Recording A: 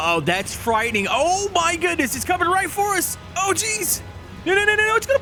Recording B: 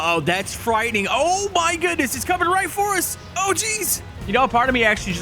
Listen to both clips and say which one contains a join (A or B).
B